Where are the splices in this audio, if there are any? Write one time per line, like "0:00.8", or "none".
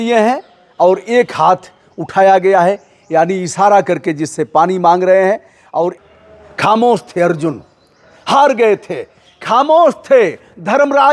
0:06.0

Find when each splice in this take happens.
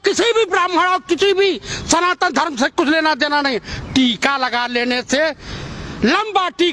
none

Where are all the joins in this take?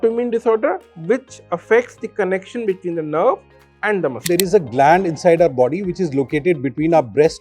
0:04.3

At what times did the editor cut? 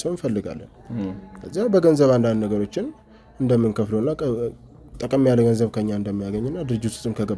none

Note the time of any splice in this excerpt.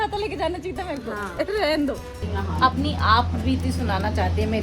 0:02.3

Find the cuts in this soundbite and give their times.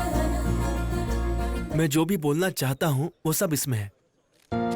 0:01.6

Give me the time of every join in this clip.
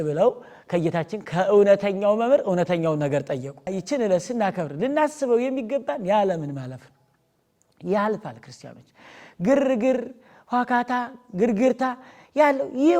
0:03.8

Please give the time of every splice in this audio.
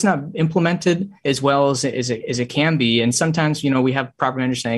0:01.2

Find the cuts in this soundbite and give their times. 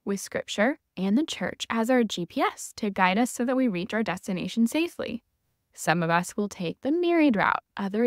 none

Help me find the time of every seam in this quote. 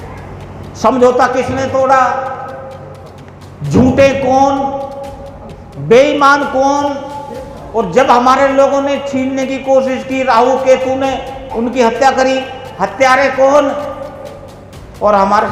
none

